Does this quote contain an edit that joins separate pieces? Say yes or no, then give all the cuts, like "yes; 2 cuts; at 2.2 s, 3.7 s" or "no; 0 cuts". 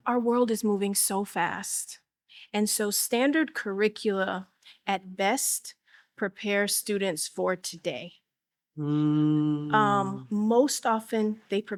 no; 0 cuts